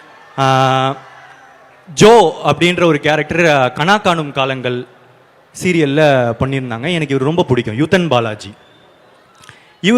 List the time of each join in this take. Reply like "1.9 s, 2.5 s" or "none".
none